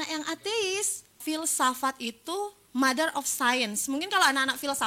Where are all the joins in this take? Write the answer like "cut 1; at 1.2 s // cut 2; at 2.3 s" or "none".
cut 1; at 1.2 s